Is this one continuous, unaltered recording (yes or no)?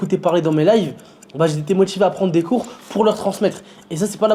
yes